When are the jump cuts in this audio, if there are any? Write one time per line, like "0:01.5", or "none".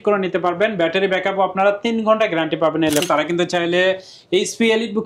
0:03.1